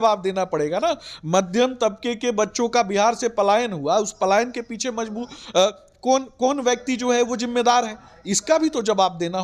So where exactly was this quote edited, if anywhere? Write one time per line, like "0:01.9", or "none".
none